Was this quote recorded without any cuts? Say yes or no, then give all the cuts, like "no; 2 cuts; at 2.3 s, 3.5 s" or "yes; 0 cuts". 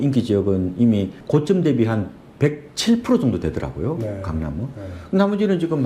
no; 1 cut; at 1.2 s